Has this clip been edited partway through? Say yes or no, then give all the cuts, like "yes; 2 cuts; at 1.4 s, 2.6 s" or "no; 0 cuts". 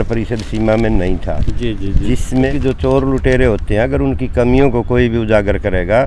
yes; 1 cut; at 2.5 s